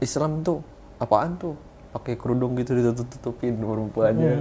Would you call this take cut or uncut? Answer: uncut